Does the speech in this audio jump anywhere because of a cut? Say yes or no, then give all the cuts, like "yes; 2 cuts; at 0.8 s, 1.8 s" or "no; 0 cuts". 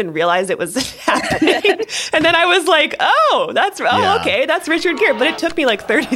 no; 0 cuts